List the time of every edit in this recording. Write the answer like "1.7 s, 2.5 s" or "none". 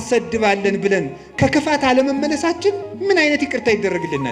none